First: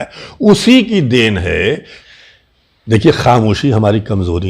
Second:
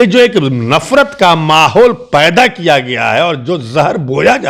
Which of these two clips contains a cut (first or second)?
first